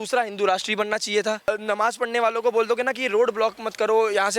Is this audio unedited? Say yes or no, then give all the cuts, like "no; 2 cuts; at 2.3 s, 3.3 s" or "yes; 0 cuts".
no; 1 cut; at 1.5 s